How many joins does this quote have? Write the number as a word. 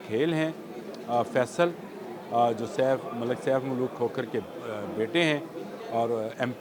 zero